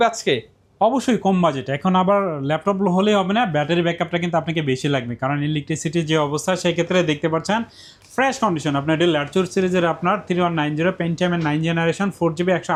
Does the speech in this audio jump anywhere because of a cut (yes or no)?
no